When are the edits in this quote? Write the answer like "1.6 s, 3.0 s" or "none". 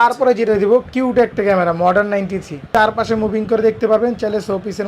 2.5 s